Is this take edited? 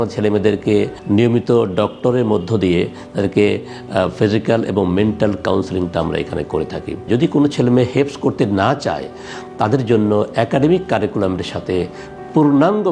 yes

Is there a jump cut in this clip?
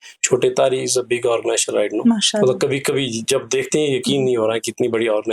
no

